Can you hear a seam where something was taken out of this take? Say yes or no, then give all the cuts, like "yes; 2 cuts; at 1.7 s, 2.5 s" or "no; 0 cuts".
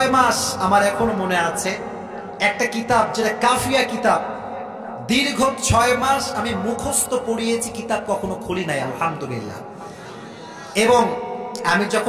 no; 0 cuts